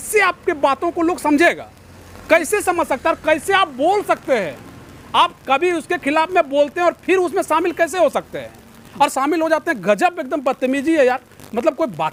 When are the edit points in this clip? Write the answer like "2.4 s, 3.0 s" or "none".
none